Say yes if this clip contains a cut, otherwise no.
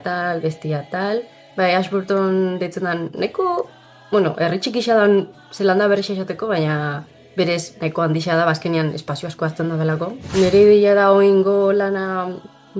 yes